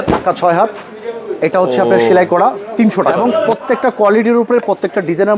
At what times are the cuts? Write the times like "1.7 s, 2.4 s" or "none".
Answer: 3.1 s